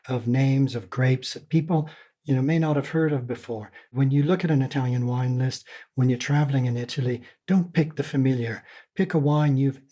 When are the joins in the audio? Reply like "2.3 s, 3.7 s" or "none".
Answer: 3.9 s

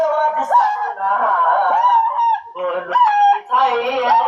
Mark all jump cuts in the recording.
none

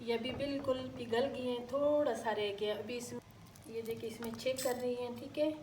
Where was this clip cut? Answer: 3.1 s

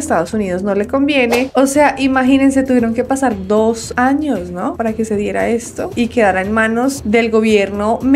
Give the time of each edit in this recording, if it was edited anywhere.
1.5 s

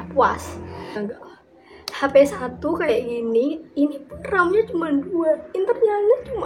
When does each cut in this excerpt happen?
1.0 s

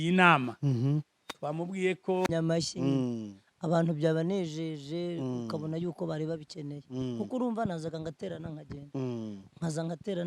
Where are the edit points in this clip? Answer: 2.3 s

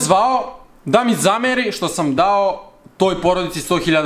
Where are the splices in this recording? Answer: none

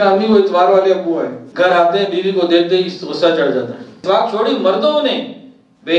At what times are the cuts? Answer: 1.4 s, 4.0 s

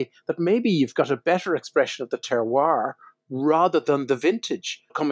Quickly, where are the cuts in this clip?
none

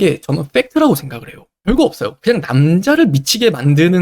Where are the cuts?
1.5 s

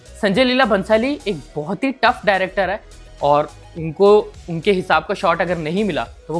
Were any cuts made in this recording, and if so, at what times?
none

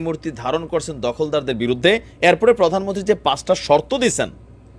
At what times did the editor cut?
2.1 s

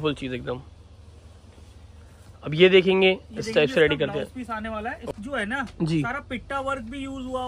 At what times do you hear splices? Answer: 5.1 s

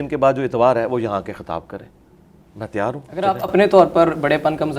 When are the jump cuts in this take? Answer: none

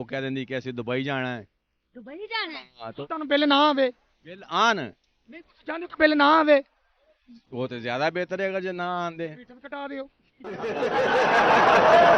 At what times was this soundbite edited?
3.0 s

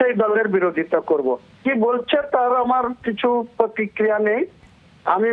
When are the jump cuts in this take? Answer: 1.6 s

